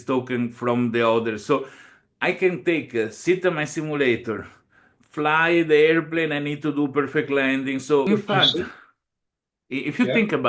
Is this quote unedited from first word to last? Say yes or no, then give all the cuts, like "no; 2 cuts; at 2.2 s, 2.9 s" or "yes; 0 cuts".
no; 1 cut; at 8.1 s